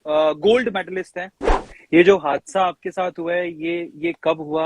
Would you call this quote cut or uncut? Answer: cut